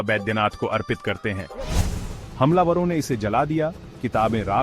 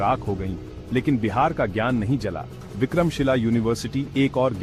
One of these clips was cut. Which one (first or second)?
first